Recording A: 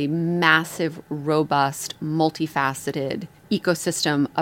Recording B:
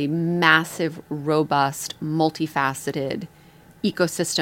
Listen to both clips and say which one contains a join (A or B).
A